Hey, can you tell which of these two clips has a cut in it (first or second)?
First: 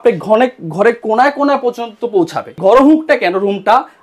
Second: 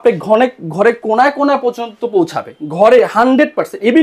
first